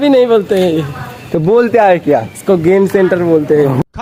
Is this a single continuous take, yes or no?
yes